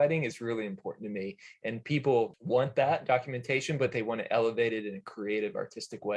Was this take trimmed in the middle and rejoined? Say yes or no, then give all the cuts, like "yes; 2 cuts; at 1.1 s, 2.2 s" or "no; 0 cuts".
yes; 1 cut; at 2.4 s